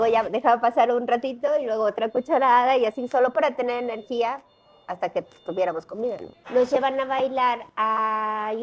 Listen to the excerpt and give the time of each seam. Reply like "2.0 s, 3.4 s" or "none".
6.3 s